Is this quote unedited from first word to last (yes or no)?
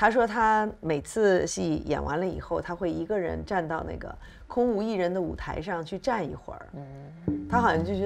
no